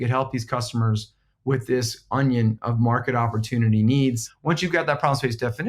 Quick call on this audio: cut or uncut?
cut